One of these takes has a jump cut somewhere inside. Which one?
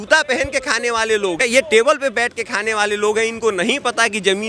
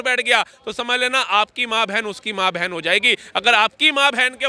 first; 1 cut; at 1.4 s

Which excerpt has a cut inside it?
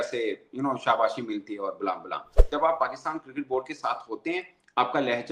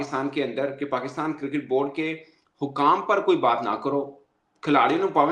first; 1 cut; at 2.4 s

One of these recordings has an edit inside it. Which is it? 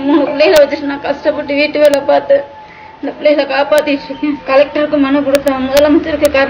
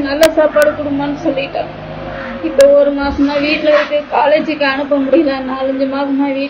first; 1 cut; at 4.4 s

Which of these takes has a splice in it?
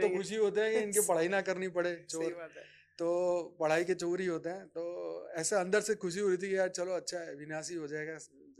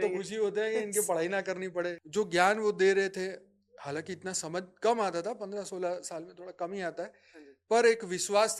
second; 1 cut; at 2.0 s

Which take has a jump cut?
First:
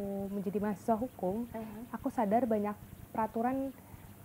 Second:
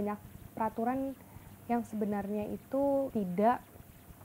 second; 1 cut; at 3.1 s

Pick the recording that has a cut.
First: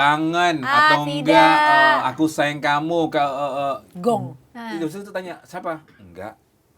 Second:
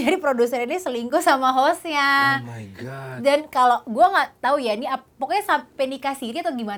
first; 1 cut; at 4.6 s

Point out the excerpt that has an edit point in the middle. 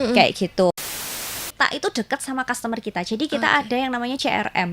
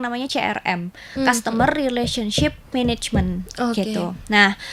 first; 1 cut; at 0.9 s

